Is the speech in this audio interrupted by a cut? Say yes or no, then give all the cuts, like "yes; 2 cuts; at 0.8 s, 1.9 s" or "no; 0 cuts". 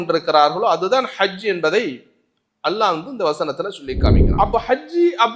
yes; 1 cut; at 4.2 s